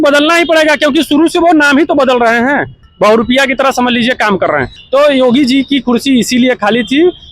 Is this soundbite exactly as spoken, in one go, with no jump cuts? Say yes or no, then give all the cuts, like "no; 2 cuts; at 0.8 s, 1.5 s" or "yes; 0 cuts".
no; 2 cuts; at 2.8 s, 4.7 s